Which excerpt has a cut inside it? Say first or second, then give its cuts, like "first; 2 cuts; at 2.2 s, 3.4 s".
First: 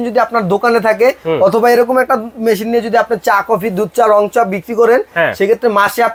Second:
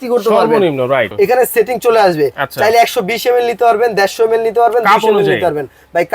second; 1 cut; at 1.1 s